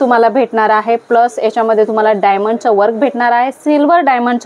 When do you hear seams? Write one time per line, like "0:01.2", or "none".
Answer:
none

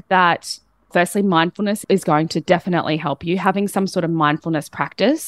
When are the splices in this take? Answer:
none

